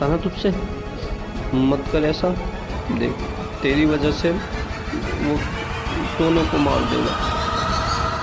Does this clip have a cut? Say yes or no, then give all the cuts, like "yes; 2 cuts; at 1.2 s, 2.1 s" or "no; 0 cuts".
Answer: yes; 1 cut; at 7.1 s